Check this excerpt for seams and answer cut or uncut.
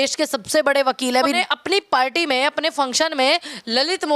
cut